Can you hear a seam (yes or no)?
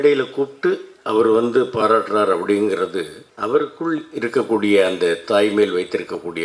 yes